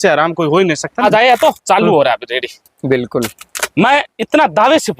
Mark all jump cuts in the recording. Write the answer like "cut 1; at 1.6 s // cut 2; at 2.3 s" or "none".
cut 1; at 0.9 s